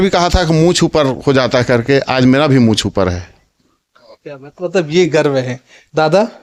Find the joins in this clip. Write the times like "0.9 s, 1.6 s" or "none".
none